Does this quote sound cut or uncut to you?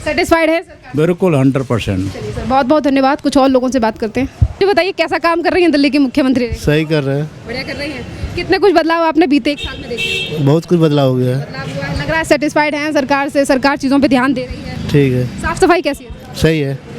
uncut